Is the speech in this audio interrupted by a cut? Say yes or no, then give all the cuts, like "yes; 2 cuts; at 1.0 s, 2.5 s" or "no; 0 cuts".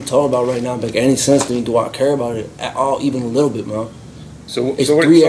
no; 0 cuts